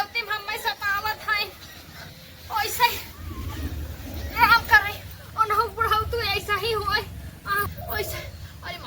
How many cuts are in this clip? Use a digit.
1